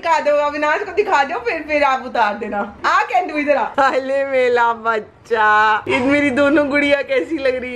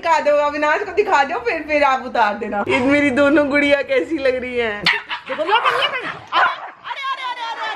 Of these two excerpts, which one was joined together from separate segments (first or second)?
second